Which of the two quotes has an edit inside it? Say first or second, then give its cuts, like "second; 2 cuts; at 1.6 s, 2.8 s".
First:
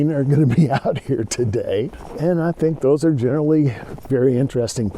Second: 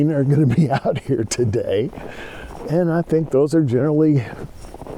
first; 2 cuts; at 2.0 s, 3.9 s